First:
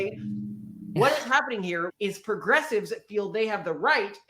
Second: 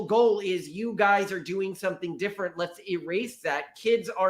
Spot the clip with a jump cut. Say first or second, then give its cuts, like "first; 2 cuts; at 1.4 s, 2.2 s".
first; 2 cuts; at 0.9 s, 1.9 s